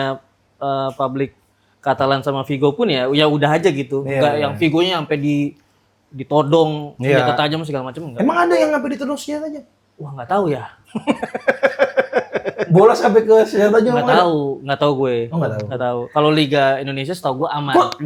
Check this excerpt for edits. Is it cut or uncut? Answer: uncut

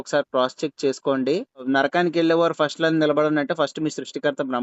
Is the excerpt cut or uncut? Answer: cut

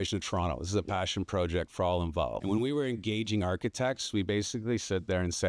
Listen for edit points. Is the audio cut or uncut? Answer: cut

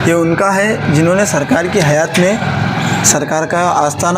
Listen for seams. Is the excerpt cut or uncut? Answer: uncut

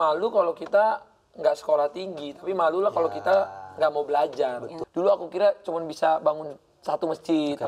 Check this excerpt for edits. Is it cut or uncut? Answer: cut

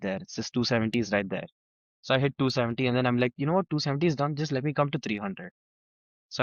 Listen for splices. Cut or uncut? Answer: uncut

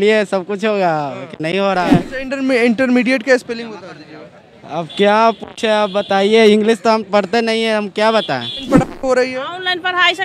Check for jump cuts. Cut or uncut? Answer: cut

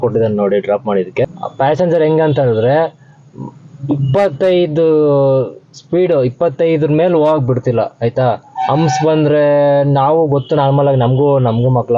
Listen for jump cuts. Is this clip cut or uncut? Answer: cut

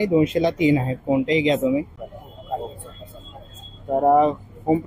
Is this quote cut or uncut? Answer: cut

